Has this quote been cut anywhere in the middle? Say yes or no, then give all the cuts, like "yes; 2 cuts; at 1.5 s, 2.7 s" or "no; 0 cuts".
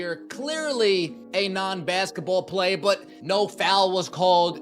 yes; 2 cuts; at 1.2 s, 3.1 s